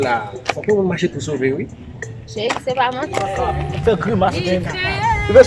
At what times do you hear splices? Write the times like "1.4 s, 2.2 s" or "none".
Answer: 3.4 s